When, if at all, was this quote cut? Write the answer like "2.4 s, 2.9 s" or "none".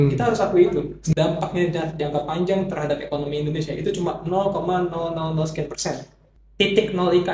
1.0 s, 6.2 s